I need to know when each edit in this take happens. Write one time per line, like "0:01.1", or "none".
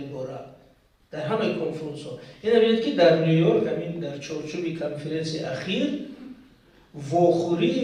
none